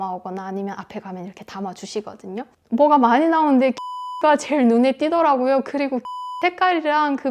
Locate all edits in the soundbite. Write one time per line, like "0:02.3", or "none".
0:02.5